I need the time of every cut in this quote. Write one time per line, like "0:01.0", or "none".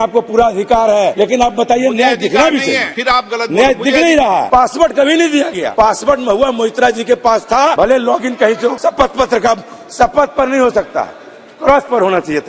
0:01.1
0:02.9
0:04.5
0:05.6
0:07.7
0:08.8